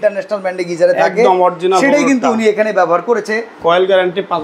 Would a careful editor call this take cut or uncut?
cut